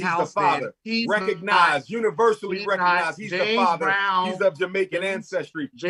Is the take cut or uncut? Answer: uncut